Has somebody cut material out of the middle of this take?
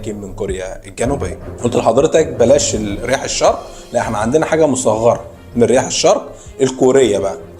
yes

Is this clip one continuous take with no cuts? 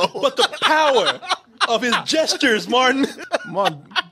no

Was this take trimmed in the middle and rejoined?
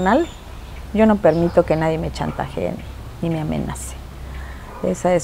no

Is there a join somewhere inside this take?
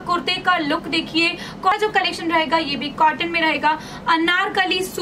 yes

